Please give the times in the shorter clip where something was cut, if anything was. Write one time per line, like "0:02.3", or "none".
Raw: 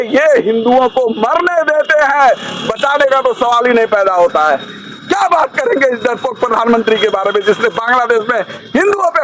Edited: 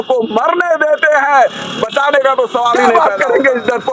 0:02.8

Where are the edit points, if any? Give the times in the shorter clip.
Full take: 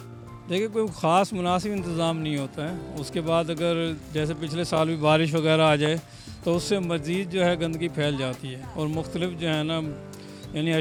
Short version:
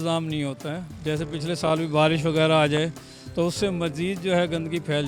0:00.9

